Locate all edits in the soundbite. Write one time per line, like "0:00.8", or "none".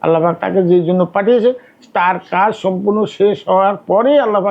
none